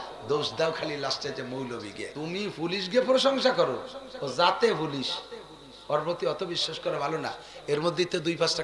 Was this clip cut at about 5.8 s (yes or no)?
no